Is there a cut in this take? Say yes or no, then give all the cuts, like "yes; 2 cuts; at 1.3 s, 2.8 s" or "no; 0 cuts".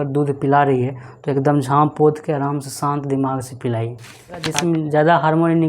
yes; 1 cut; at 4.5 s